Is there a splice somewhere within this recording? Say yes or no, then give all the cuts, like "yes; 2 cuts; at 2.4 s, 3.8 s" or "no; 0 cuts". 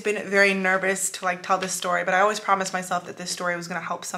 no; 0 cuts